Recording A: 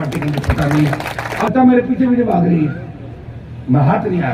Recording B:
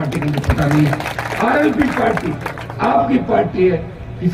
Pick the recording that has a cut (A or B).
A